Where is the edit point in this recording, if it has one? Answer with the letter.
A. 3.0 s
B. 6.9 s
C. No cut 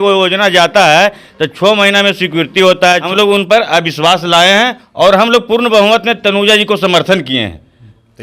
A